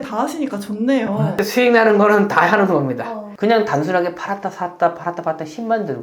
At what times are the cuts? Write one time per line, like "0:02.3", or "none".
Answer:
0:03.2